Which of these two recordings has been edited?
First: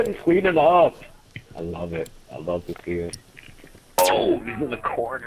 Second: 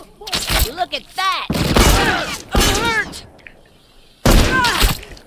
first; 1 cut; at 4.0 s

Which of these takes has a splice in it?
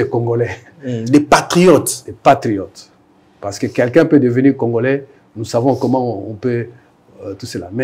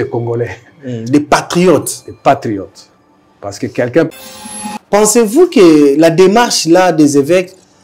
second; 1 cut; at 4.4 s

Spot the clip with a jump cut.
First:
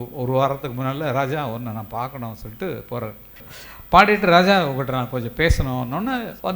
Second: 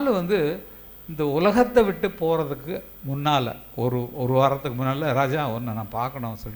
first; 1 cut; at 3.5 s

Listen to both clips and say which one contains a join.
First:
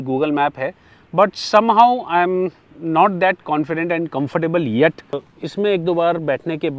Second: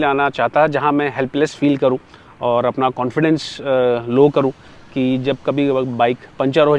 first; 1 cut; at 5.3 s

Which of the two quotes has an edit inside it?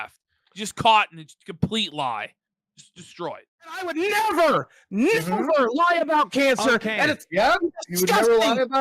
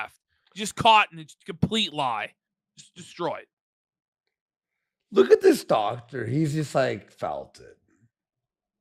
first; 1 cut; at 3.9 s

